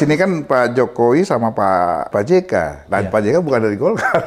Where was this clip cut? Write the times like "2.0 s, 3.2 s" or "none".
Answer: 2.1 s